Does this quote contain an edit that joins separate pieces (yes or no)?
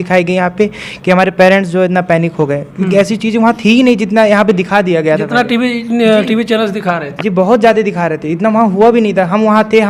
no